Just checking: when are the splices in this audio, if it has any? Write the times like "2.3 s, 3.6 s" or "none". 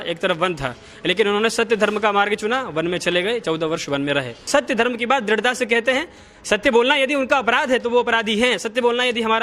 4.5 s

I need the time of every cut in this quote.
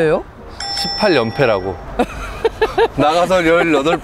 1.8 s

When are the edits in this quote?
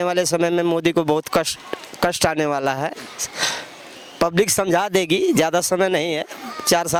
none

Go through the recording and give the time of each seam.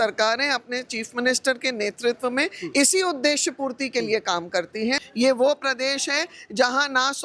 5.1 s

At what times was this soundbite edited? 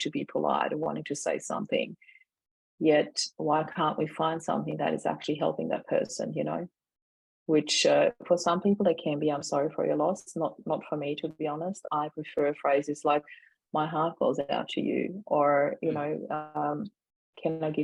none

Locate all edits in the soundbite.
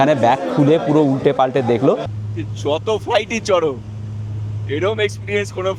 2.1 s

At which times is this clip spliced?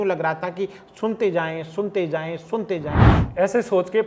3.0 s

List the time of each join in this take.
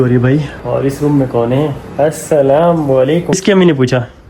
3.4 s

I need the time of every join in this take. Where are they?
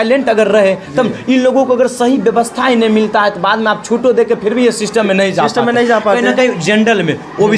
none

